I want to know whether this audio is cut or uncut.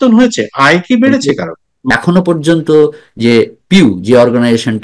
cut